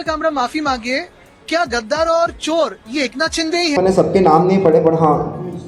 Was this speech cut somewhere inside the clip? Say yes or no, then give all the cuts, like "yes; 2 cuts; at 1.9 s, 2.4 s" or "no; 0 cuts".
yes; 1 cut; at 3.8 s